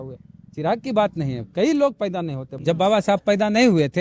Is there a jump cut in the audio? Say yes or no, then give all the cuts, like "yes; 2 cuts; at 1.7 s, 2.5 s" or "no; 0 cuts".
yes; 1 cut; at 2.5 s